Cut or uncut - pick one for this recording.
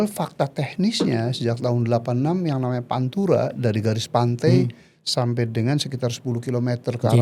uncut